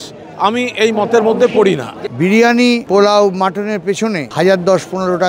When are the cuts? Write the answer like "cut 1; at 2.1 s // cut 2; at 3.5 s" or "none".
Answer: cut 1; at 1.9 s // cut 2; at 2.8 s // cut 3; at 4.3 s

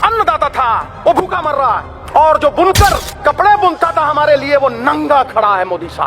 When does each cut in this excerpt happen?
cut 1; at 0.9 s // cut 2; at 1.9 s // cut 3; at 3.1 s

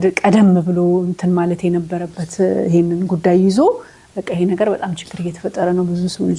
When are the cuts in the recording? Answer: none

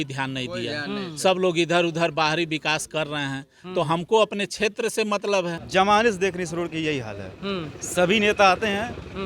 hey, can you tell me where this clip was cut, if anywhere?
cut 1; at 5.6 s

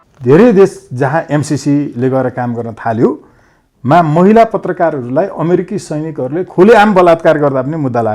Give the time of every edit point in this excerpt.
none

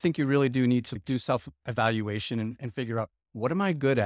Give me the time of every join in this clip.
cut 1; at 1.0 s

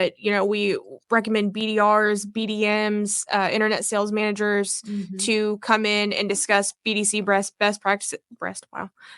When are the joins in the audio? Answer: cut 1; at 0.9 s

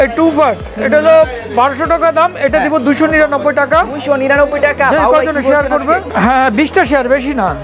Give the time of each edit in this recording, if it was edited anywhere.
cut 1; at 6.1 s

